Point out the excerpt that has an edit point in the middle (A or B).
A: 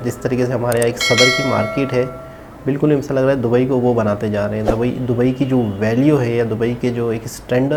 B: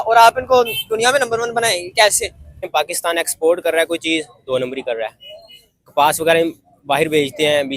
B